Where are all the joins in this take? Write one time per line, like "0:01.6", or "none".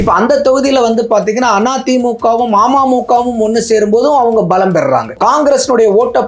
0:05.1